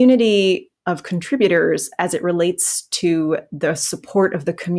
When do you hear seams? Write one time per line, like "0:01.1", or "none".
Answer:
none